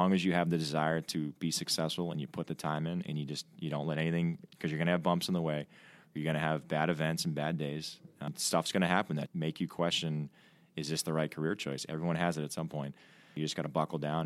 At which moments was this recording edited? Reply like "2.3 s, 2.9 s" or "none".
8.0 s, 9.3 s, 13.3 s